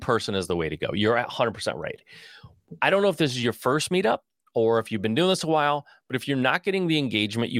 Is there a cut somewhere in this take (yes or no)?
no